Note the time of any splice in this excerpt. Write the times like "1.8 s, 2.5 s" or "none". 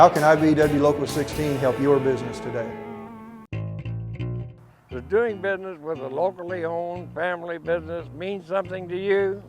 3.1 s

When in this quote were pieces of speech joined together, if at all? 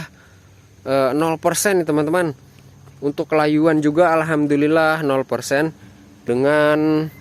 6.2 s

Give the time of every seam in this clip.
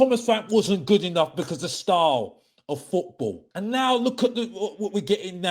3.4 s

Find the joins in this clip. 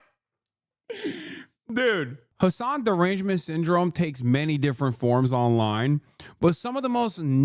2.2 s

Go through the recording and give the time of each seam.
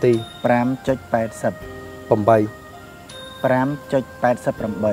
none

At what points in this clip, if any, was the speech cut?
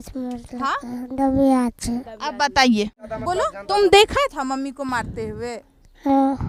none

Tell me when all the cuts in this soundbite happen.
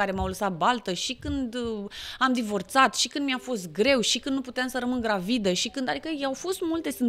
none

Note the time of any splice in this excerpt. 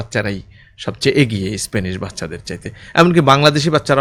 none

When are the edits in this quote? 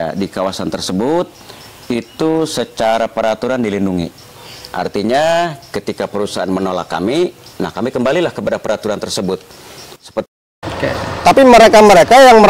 10.3 s

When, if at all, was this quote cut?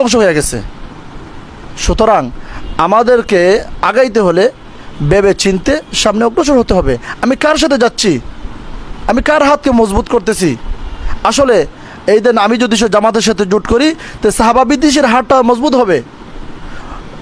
none

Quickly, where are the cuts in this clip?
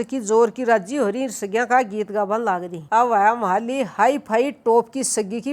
2.8 s

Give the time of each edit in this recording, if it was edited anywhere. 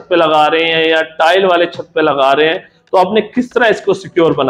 none

